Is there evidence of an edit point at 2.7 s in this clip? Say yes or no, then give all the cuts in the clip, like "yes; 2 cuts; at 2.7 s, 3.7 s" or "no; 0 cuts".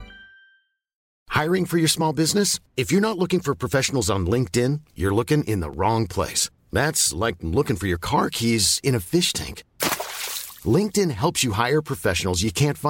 no; 1 cut; at 1.0 s